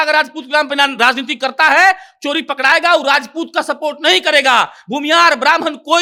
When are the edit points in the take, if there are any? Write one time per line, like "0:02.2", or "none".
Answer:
none